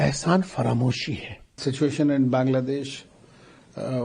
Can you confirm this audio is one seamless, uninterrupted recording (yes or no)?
no